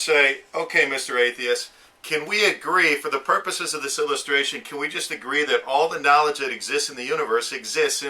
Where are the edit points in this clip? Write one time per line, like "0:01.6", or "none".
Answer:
none